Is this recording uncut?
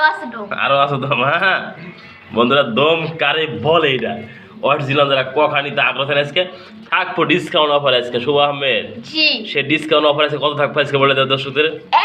yes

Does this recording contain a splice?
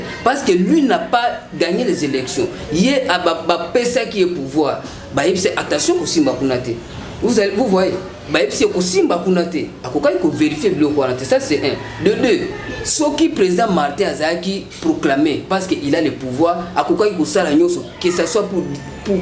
no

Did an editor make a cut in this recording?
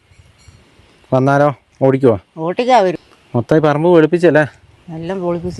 yes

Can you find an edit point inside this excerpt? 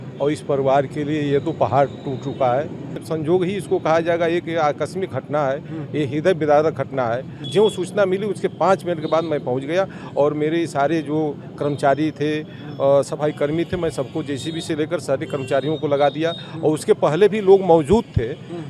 yes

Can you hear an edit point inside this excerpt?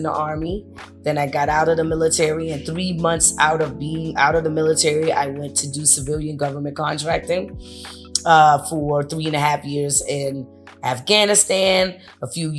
no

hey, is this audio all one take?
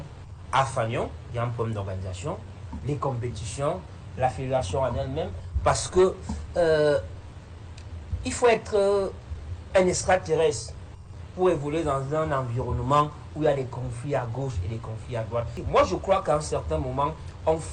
no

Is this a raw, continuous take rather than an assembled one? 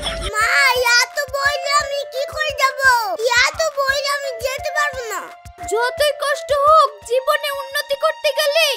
yes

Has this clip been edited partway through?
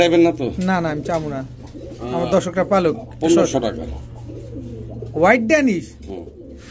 no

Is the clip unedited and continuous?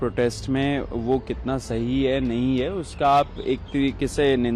yes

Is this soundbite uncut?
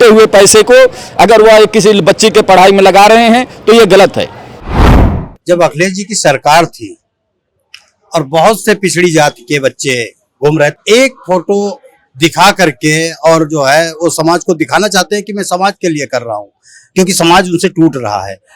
no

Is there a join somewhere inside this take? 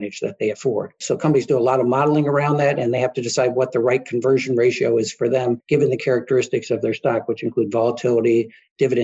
yes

